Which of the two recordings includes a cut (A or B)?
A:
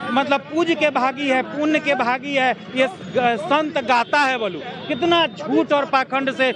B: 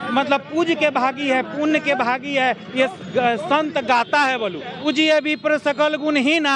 B